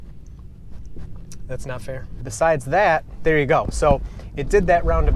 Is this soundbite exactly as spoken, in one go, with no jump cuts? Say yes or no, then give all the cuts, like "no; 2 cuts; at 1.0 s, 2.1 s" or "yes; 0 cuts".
no; 1 cut; at 2.3 s